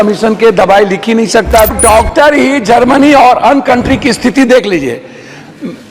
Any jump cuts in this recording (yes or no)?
yes